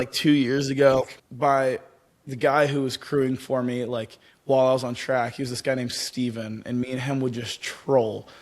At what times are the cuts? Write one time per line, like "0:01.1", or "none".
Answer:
0:01.2